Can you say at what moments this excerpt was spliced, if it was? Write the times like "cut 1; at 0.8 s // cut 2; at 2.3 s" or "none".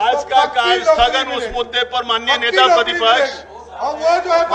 none